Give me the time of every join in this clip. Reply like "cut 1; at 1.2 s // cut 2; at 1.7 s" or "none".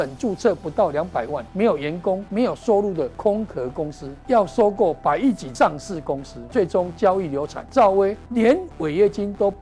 cut 1; at 1.4 s // cut 2; at 2.3 s // cut 3; at 3.1 s // cut 4; at 4.1 s // cut 5; at 5.5 s // cut 6; at 6.3 s // cut 7; at 7.6 s // cut 8; at 8.2 s